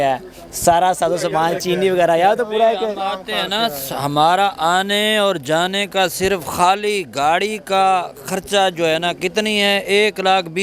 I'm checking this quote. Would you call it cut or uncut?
uncut